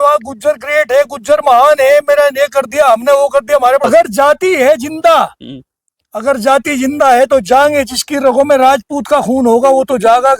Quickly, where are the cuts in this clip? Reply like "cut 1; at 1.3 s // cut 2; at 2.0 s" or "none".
cut 1; at 3.8 s